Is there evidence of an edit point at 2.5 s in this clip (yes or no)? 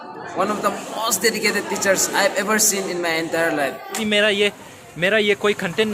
no